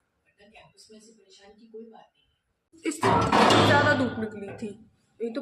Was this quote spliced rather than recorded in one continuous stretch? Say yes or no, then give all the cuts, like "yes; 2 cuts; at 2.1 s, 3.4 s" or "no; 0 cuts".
yes; 1 cut; at 2.6 s